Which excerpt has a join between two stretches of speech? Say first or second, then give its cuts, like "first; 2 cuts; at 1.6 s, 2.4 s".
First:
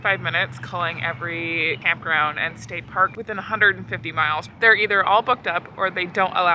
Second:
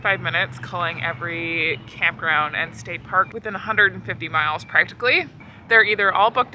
first; 2 cuts; at 1.8 s, 4.5 s